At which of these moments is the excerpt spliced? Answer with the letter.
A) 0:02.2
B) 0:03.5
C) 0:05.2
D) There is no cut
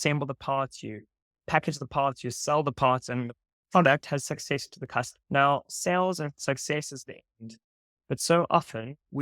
C